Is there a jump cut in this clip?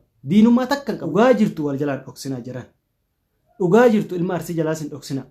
yes; 1 cut; at 1.0 s

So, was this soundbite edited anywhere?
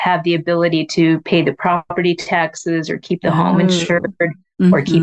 no; 0 cuts

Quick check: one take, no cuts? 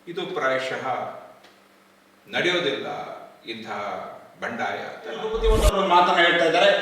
no; 1 cut; at 5.3 s

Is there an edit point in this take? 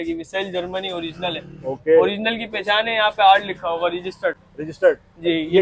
no; 0 cuts

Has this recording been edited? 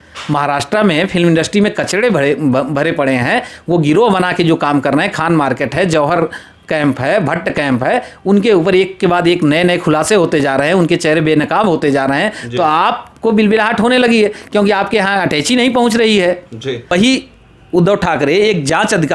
yes; 1 cut; at 16.9 s

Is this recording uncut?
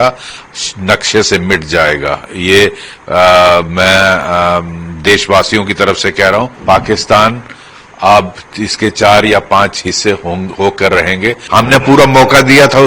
no; 2 cuts; at 6.5 s, 11.4 s

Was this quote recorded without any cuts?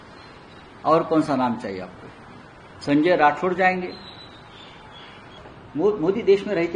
no; 1 cut; at 5.4 s

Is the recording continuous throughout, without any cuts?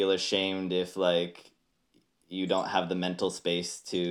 yes; 0 cuts

